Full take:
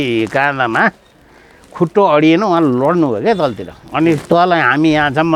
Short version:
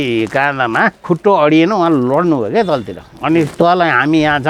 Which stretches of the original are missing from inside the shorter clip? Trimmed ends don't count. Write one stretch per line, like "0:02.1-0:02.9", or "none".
0:01.0-0:01.7